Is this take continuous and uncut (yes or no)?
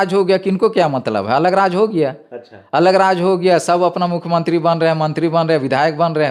yes